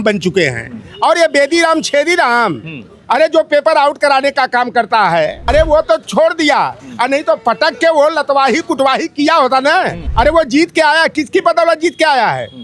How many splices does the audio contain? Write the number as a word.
two